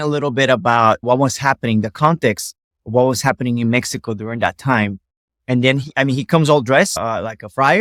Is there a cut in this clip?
no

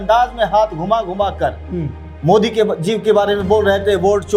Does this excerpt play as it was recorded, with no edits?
yes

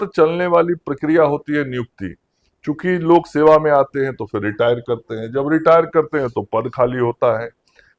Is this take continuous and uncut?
yes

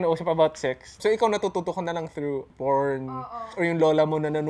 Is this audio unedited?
no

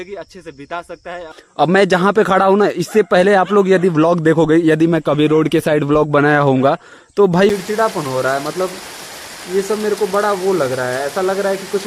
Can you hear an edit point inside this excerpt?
yes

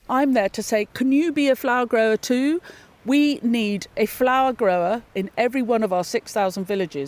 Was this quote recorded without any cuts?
no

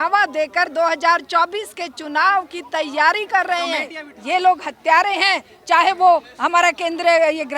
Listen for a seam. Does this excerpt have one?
yes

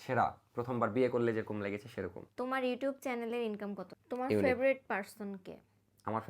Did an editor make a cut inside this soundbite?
yes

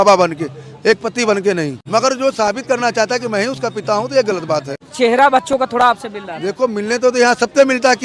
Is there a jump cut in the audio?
yes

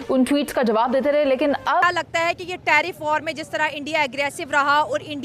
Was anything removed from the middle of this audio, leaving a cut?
yes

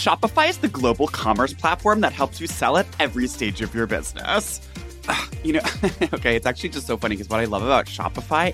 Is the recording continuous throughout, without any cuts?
no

